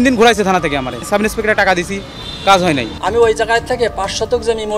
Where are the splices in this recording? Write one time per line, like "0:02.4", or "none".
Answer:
0:01.0
0:02.9